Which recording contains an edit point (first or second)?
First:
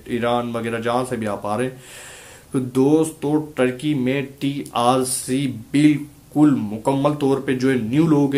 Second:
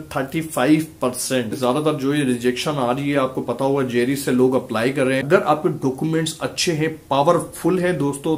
second